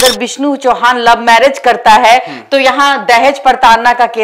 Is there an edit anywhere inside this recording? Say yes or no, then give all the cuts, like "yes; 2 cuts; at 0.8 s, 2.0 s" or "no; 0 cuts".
no; 0 cuts